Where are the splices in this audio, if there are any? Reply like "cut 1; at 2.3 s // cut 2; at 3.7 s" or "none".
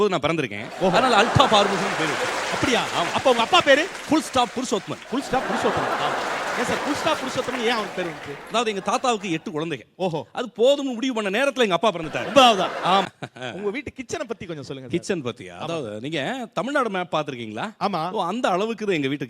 cut 1; at 13.0 s

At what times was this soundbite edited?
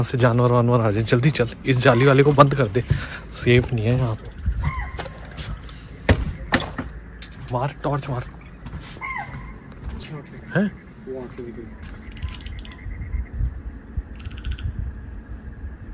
none

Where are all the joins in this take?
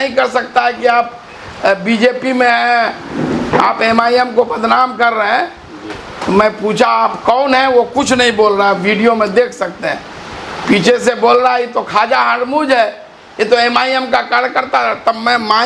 none

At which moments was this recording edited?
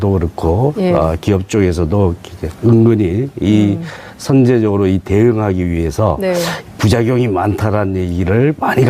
cut 1; at 4.9 s

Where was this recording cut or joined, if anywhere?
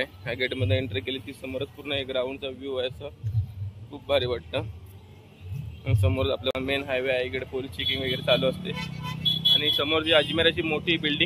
cut 1; at 6.5 s

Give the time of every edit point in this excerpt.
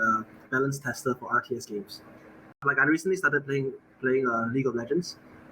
cut 1; at 2.6 s

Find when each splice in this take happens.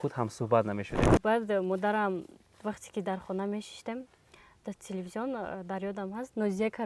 cut 1; at 1.0 s

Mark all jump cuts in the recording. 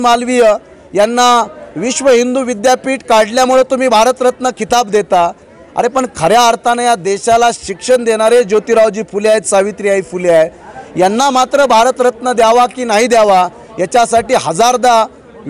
none

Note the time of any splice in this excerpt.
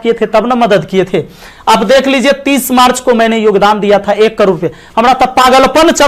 none

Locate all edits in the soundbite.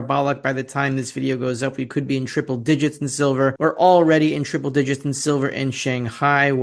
cut 1; at 3.6 s

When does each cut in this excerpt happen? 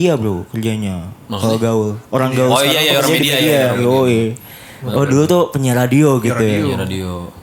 none

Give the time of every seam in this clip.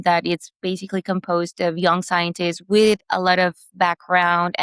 none

